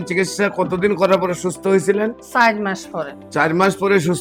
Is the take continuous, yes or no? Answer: yes